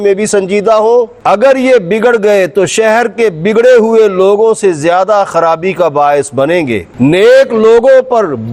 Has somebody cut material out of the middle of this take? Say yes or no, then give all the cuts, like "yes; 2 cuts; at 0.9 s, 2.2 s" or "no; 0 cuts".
yes; 2 cuts; at 1.1 s, 6.9 s